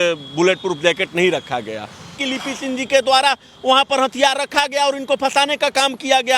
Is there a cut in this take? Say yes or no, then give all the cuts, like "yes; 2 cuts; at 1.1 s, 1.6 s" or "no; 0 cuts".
yes; 1 cut; at 2.2 s